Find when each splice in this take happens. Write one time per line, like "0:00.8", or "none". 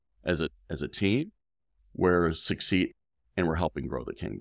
0:02.9